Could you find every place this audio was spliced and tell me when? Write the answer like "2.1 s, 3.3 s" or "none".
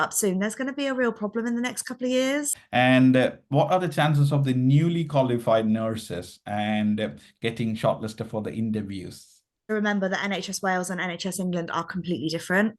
2.6 s, 9.7 s